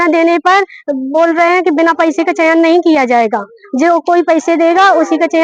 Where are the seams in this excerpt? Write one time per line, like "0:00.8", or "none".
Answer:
none